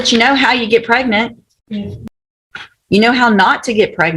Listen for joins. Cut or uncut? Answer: cut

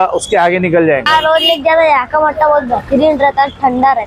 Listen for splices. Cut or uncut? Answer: cut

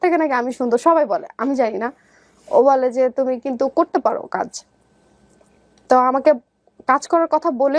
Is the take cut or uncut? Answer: uncut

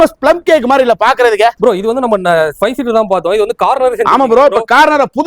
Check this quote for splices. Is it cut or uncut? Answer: cut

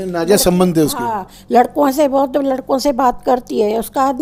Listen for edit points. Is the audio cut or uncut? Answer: uncut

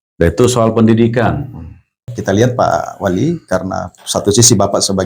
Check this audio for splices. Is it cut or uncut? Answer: cut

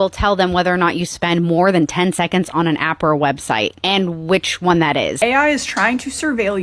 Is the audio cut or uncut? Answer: cut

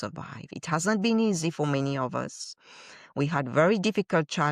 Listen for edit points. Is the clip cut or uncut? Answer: uncut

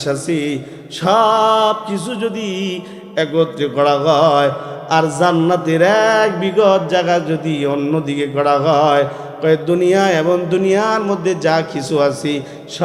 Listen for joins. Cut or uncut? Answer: uncut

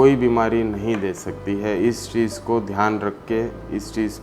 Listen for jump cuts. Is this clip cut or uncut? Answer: uncut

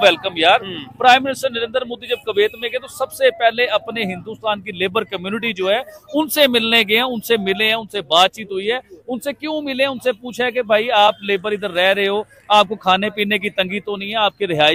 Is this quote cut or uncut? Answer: uncut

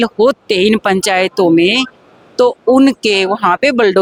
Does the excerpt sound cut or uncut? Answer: uncut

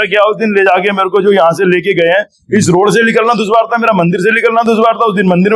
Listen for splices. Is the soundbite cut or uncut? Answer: uncut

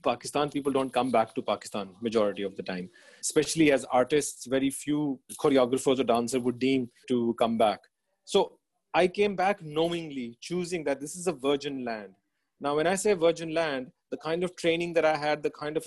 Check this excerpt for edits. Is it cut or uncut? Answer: cut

